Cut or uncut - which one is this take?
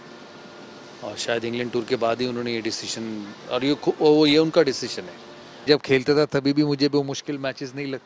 cut